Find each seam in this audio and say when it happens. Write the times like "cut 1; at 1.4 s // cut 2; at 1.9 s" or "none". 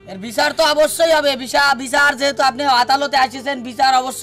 none